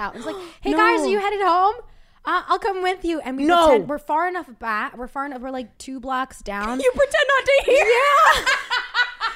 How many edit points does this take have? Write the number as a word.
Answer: zero